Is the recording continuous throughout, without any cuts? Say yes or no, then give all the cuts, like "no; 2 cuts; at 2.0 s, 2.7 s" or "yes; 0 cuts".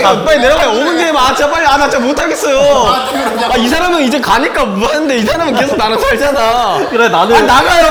yes; 0 cuts